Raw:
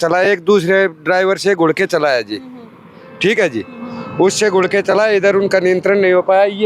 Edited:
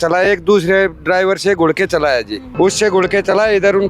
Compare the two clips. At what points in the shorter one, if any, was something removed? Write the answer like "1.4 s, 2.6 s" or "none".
2.4 s